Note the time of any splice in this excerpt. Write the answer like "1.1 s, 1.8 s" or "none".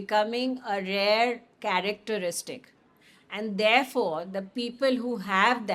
none